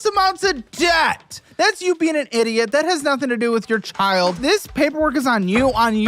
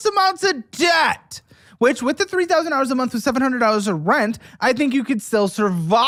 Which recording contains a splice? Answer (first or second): first